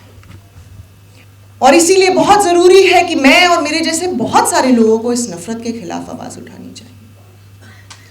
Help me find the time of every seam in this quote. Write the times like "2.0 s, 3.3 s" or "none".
1.2 s